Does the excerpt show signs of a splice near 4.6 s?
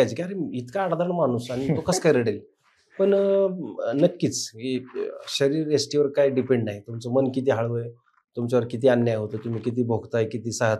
no; 0 cuts

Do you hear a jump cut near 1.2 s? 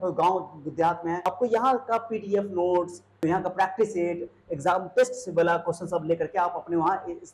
yes; 2 cuts; at 1.2 s, 3.2 s

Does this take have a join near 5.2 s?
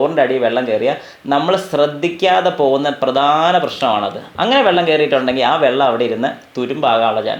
no; 0 cuts

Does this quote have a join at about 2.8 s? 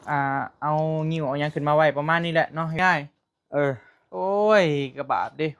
yes; 1 cut; at 2.8 s

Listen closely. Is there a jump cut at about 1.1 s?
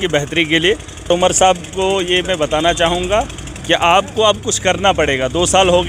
yes; 1 cut; at 1.1 s

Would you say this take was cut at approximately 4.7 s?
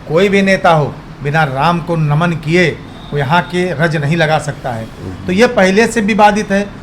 no; 0 cuts

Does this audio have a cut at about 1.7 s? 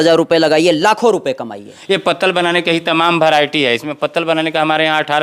yes; 1 cut; at 1.7 s

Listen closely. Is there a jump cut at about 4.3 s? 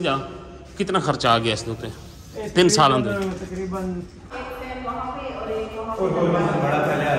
yes; 1 cut; at 4.3 s

